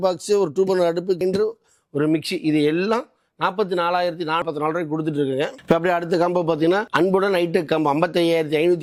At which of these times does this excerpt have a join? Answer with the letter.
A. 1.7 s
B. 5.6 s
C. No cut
C